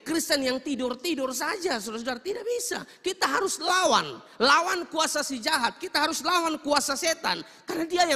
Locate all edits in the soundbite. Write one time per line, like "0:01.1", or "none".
none